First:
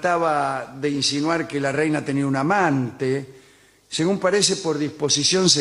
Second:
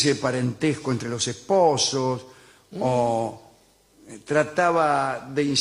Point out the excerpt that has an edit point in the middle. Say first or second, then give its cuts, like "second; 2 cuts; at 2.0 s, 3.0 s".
second; 1 cut; at 3.0 s